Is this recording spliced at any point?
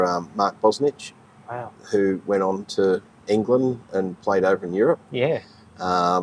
no; 0 cuts

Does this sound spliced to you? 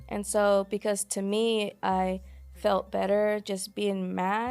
no; 0 cuts

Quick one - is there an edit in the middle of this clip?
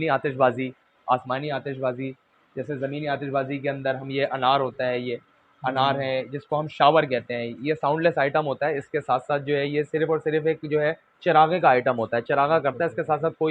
no; 0 cuts

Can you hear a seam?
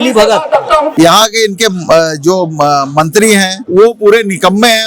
yes; 2 cuts; at 0.9 s, 3.6 s

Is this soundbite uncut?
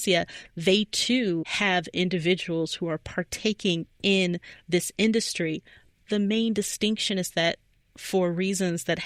yes; 0 cuts

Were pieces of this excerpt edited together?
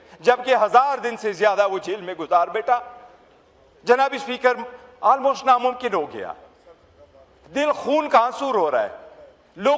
no; 0 cuts

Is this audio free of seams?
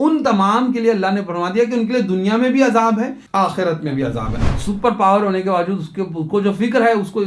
no; 2 cuts; at 3.2 s, 4.3 s

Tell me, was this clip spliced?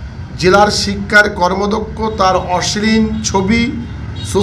no; 0 cuts

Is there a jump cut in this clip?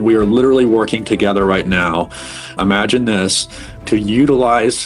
yes; 1 cut; at 3.8 s

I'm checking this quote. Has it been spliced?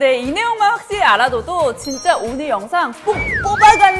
no; 0 cuts

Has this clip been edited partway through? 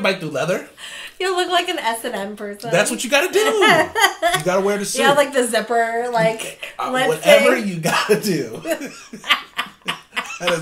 no; 0 cuts

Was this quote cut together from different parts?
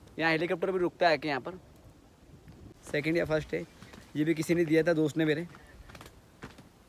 yes; 1 cut; at 2.6 s

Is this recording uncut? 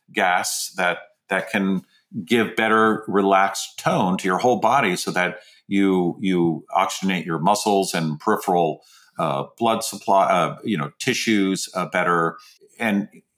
yes; 0 cuts

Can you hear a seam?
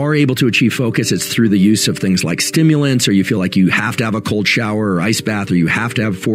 no; 0 cuts

